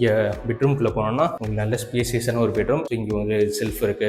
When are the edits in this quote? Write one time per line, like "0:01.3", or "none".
0:02.9